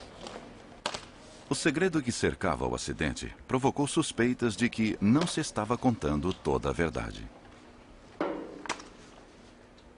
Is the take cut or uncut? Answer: cut